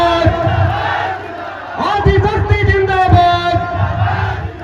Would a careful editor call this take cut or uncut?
uncut